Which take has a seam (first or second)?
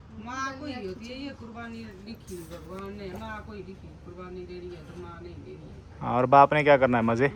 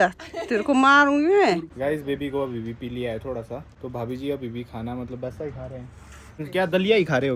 second